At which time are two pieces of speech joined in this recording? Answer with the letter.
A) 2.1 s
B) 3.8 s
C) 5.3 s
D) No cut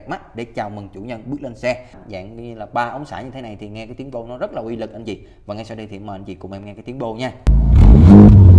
A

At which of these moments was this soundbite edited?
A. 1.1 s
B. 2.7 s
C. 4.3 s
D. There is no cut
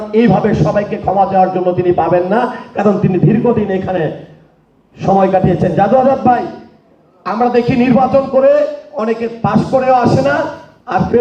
D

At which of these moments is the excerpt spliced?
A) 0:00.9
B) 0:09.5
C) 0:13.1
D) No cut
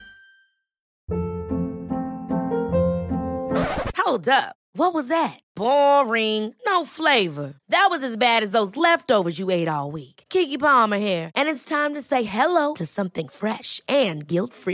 A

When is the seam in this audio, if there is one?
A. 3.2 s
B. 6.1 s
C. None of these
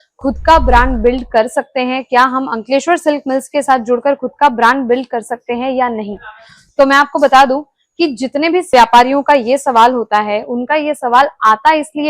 C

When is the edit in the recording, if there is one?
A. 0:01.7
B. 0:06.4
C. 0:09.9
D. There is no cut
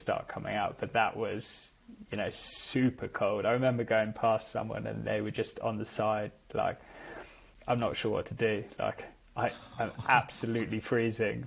D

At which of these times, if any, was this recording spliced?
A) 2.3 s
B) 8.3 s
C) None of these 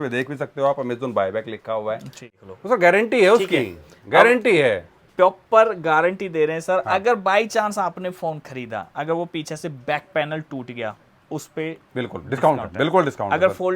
A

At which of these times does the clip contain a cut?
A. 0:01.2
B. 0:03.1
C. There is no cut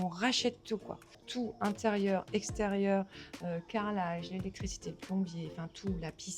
A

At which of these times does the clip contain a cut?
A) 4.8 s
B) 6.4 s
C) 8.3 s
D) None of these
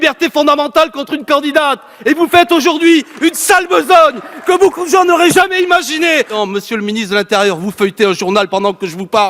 B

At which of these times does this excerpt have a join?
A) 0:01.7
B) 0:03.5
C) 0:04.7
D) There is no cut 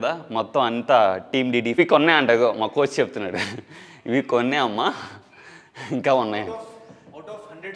A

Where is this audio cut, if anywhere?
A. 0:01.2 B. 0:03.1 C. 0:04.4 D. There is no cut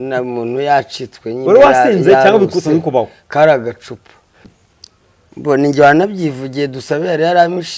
C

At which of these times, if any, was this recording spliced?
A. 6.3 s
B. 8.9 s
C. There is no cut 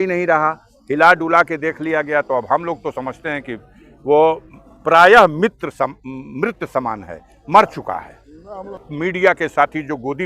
B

